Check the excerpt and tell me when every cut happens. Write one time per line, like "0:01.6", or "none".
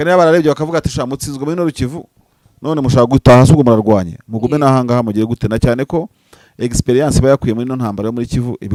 none